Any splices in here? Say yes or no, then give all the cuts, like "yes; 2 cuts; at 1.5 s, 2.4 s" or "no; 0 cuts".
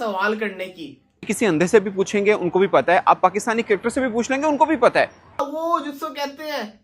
yes; 2 cuts; at 1.3 s, 5.4 s